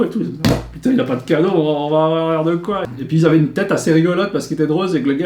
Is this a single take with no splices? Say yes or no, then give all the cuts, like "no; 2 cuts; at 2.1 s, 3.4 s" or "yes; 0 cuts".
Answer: no; 1 cut; at 2.8 s